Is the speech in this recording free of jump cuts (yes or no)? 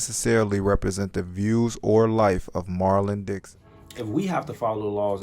no